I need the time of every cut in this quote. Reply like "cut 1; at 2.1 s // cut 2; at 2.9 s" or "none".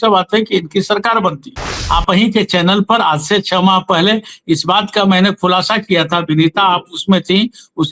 cut 1; at 1.7 s